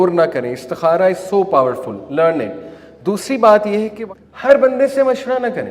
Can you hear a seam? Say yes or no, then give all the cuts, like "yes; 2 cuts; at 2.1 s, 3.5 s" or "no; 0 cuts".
yes; 1 cut; at 3.9 s